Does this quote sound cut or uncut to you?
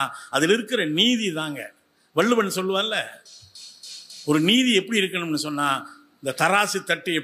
uncut